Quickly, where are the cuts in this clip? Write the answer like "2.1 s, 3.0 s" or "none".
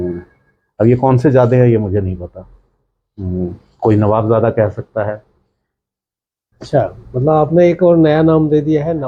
none